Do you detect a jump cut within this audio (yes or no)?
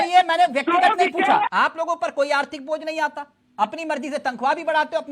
yes